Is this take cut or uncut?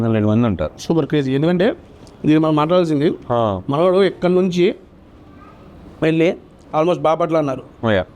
uncut